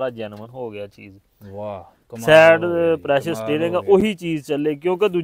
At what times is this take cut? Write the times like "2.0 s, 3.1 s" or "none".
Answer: none